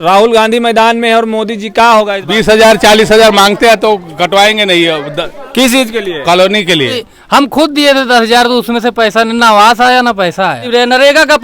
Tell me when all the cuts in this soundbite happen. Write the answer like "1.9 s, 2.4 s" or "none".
2.2 s, 7.1 s, 10.7 s